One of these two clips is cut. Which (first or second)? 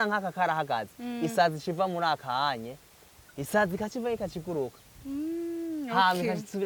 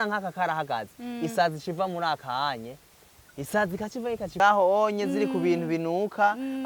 second